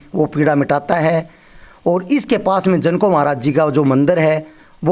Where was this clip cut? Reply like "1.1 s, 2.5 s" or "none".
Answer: none